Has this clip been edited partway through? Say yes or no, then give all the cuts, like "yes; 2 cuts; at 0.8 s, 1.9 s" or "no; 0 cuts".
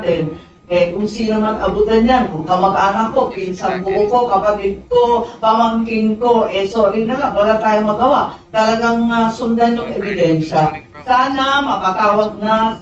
no; 0 cuts